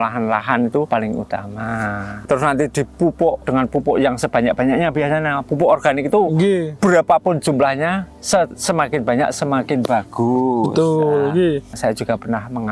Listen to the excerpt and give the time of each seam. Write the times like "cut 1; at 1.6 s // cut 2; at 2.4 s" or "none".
cut 1; at 0.9 s // cut 2; at 2.2 s // cut 3; at 3.4 s // cut 4; at 6.7 s // cut 5; at 11.7 s